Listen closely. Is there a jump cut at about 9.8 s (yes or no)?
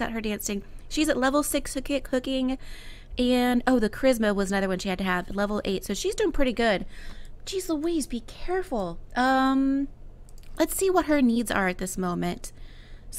yes